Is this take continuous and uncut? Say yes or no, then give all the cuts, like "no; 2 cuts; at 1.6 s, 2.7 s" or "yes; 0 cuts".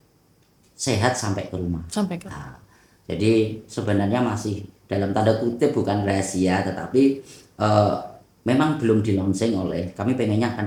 yes; 0 cuts